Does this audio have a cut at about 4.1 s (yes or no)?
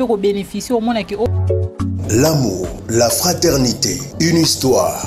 no